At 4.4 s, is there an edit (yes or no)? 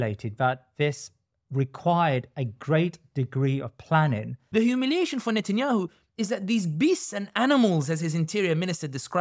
yes